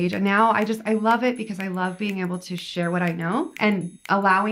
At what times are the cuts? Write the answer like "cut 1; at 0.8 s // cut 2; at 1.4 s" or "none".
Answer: cut 1; at 3.5 s